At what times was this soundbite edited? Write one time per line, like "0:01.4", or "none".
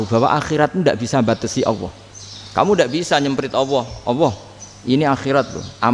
none

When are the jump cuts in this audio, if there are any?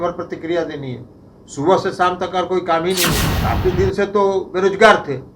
0:03.3

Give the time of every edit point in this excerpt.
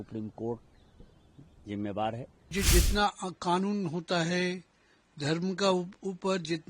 0:02.5

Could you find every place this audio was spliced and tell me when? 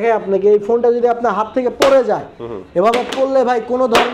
none

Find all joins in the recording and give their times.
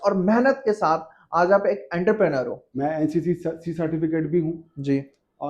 0:02.6

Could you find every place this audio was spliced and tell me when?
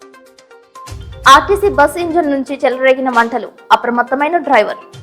0:00.9

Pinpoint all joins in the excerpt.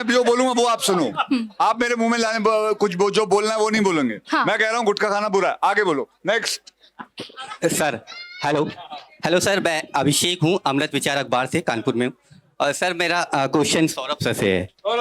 none

